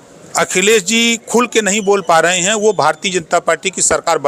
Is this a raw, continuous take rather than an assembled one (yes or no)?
yes